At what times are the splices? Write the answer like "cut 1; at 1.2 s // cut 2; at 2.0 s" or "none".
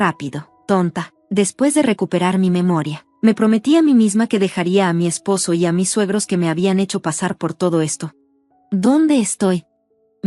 cut 1; at 1.1 s